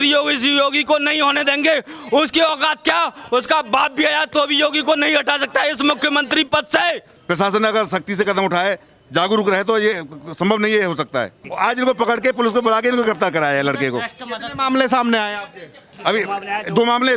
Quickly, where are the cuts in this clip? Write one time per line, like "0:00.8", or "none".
0:07.1
0:11.4